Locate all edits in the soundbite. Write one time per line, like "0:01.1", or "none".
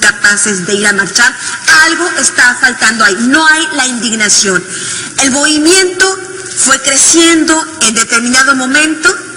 0:02.3